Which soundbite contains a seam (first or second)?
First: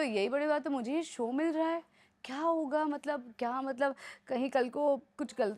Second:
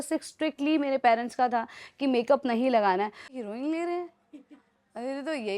second